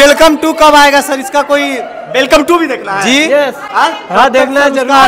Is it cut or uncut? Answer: uncut